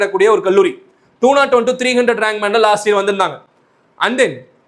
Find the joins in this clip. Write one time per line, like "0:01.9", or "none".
none